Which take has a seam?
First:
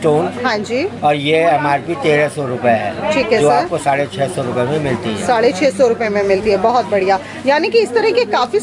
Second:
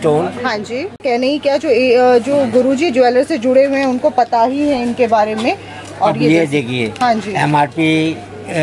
second; 1 cut; at 1.0 s

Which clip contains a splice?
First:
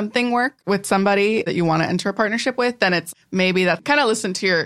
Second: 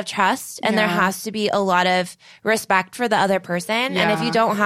first; 2 cuts; at 1.5 s, 3.0 s

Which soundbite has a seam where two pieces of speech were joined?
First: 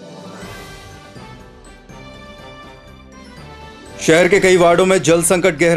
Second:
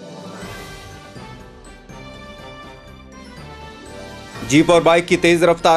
first; 1 cut; at 3.9 s

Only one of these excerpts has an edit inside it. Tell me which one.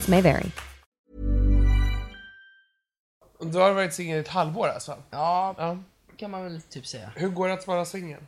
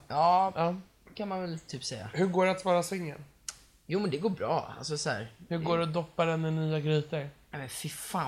first; 1 cut; at 3.2 s

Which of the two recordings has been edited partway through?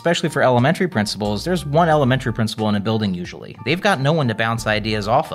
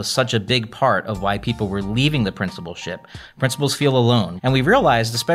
second; 1 cut; at 4.3 s

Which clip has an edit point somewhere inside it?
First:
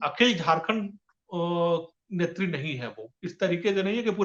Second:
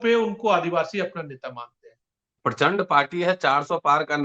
second; 1 cut; at 2.4 s

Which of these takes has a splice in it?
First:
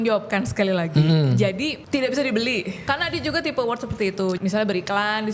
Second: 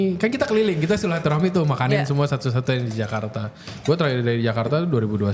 first; 3 cuts; at 1.8 s, 2.8 s, 4.4 s

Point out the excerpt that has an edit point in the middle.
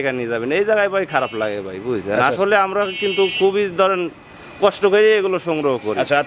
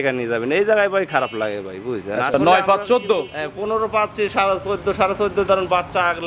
second; 1 cut; at 2.3 s

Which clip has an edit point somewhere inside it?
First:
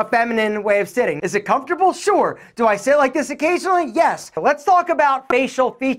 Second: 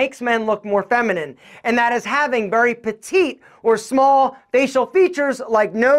first; 2 cuts; at 1.2 s, 4.3 s

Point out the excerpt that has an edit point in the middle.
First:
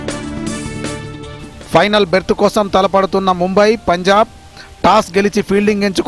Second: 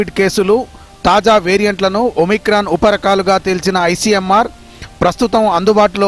first; 1 cut; at 1.4 s

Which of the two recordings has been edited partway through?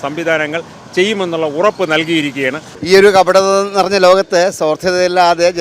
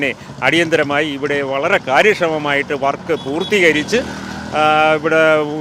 first; 1 cut; at 2.7 s

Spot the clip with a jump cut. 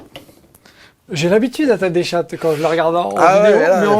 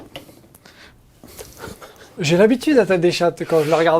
first; 1 cut; at 0.9 s

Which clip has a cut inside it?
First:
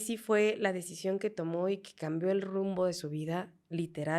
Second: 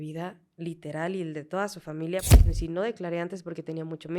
second; 1 cut; at 2.4 s

